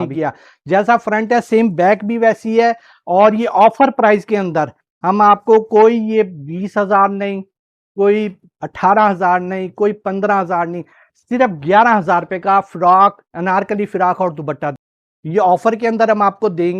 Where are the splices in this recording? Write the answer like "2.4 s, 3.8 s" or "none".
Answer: 0.9 s, 14.8 s